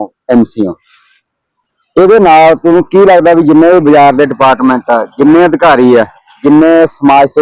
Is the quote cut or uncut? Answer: uncut